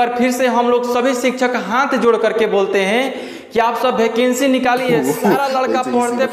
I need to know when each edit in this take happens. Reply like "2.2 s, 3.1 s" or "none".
none